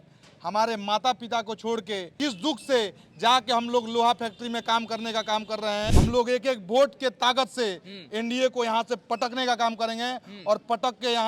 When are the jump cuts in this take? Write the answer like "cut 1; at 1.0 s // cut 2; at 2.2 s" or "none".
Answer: cut 1; at 2.1 s // cut 2; at 5.9 s